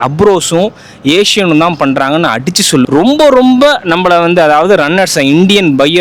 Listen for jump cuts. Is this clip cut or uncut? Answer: cut